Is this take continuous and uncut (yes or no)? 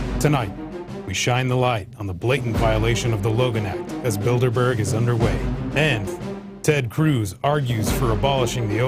yes